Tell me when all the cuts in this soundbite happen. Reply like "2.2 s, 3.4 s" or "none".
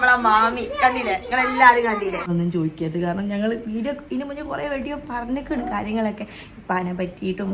2.3 s